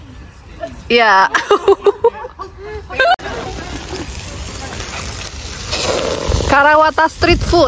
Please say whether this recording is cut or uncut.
cut